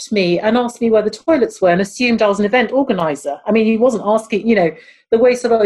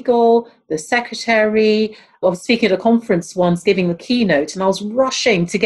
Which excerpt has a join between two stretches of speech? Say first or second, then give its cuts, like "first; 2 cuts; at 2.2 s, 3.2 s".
second; 1 cut; at 2.2 s